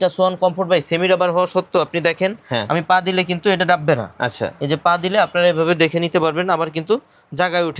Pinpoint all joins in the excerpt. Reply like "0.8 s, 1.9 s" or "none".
none

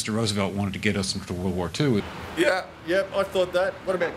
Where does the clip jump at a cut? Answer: none

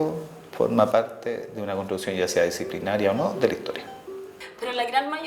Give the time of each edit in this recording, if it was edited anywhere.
4.3 s

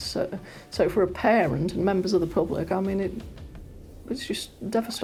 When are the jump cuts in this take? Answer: none

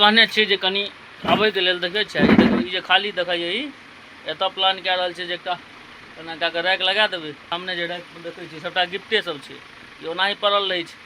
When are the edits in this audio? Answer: 7.5 s

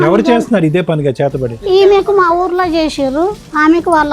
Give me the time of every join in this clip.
1.4 s

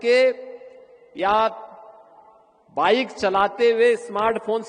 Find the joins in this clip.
none

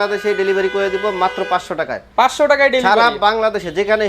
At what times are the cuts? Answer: none

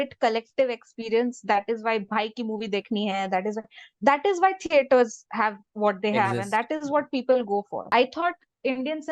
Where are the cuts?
7.8 s

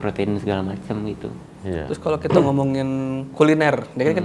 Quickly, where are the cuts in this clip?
none

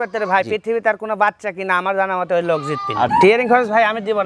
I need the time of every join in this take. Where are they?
3.1 s

